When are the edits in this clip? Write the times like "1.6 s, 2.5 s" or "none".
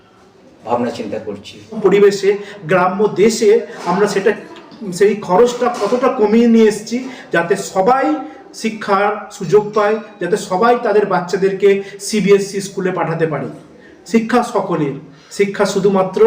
1.8 s